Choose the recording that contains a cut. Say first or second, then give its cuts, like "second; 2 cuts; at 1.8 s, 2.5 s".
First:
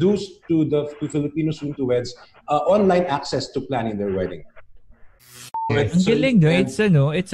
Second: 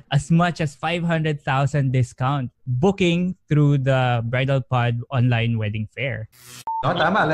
first; 1 cut; at 5.7 s